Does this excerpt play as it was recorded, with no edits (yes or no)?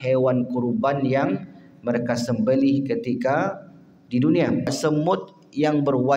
no